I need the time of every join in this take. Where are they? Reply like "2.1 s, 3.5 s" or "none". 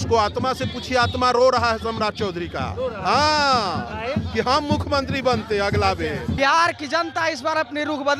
6.4 s

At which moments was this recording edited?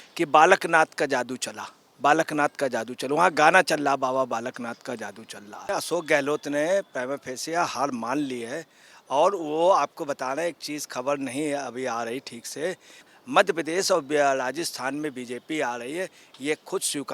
5.7 s, 13.1 s

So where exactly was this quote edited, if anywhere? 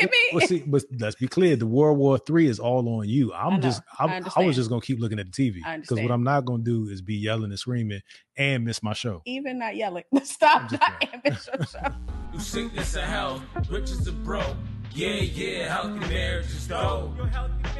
12.2 s

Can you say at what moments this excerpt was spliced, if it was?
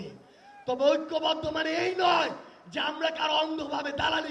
none

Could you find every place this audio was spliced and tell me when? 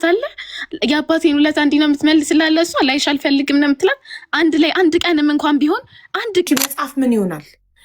6.5 s

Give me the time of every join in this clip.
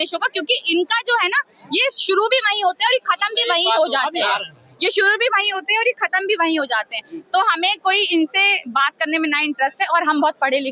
none

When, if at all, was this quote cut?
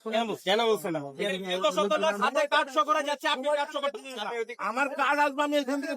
1.1 s, 4.5 s

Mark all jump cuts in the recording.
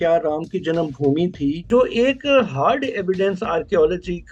1.6 s

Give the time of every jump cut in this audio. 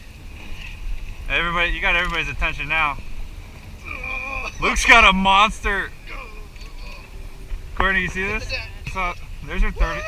8.9 s

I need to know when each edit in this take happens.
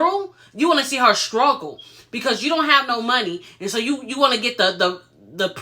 none

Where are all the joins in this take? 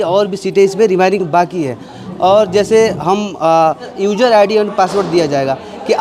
3.9 s

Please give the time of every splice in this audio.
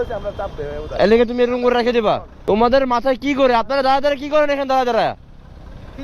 2.3 s

